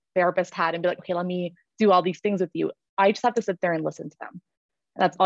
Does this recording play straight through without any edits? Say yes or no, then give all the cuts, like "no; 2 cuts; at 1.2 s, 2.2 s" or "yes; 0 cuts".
yes; 0 cuts